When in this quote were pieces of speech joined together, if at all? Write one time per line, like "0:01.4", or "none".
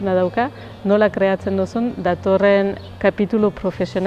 0:02.8